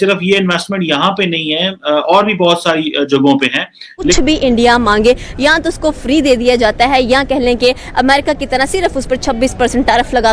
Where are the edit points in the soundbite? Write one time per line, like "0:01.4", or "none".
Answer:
0:04.1